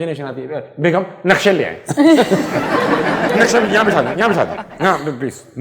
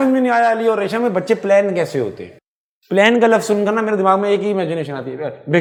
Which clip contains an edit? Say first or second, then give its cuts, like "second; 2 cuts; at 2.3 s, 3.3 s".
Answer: first; 1 cut; at 3.3 s